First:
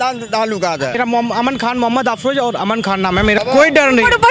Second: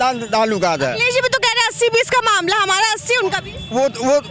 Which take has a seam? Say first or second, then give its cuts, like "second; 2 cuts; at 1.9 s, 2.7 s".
first; 2 cuts; at 1.0 s, 3.4 s